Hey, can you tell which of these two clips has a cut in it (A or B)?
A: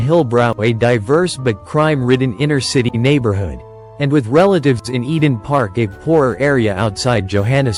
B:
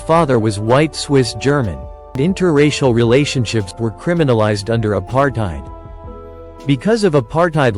B